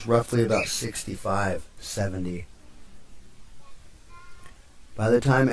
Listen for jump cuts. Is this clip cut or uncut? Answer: uncut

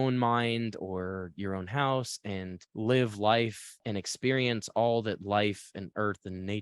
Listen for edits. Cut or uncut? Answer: uncut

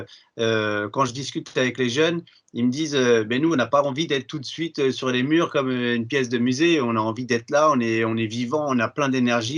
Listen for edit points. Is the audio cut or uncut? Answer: uncut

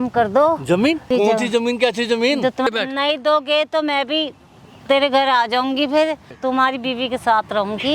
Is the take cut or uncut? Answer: cut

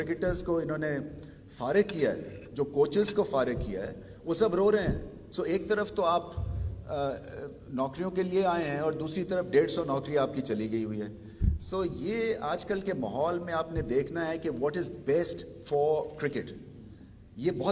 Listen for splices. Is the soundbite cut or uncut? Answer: uncut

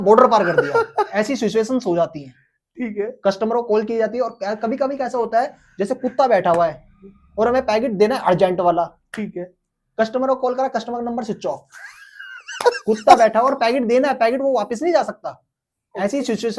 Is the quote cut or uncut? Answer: uncut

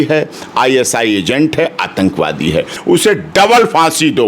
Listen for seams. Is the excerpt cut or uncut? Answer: cut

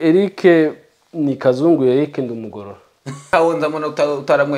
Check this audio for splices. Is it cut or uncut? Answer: cut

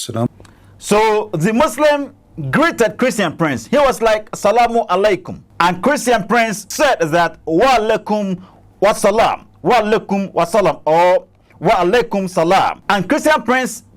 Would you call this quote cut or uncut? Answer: cut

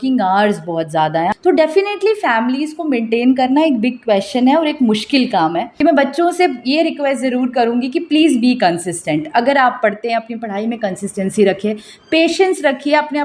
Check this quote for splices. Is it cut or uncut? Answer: cut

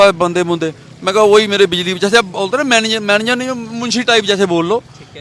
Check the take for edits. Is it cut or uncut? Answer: uncut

